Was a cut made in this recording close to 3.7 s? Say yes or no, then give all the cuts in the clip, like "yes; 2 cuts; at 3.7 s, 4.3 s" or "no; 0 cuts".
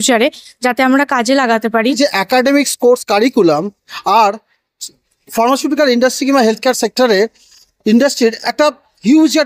no; 1 cut; at 1.9 s